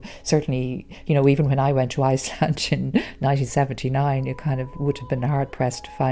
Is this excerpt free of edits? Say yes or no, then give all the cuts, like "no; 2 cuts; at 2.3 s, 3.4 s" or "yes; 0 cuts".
yes; 0 cuts